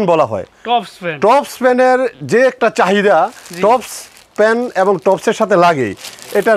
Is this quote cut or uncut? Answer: uncut